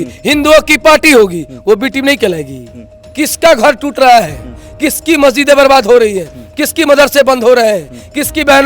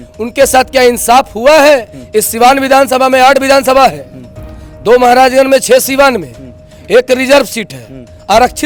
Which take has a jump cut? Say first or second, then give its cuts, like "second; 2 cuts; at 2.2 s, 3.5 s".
first; 1 cut; at 3.0 s